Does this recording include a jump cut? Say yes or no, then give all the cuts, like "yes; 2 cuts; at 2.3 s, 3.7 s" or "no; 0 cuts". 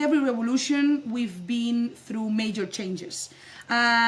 no; 0 cuts